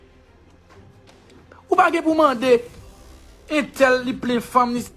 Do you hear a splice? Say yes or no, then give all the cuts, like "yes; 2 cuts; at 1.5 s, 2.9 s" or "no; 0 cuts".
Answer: yes; 1 cut; at 1.0 s